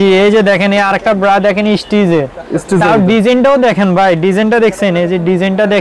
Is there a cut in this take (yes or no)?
no